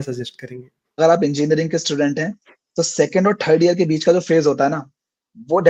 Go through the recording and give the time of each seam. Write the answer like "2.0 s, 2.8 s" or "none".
1.0 s